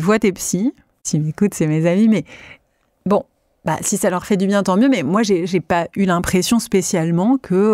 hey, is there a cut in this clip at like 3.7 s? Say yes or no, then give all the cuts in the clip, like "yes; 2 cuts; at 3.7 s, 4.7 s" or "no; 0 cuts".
no; 1 cut; at 1.1 s